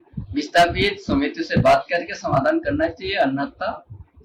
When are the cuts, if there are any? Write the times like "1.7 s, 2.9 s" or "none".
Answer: none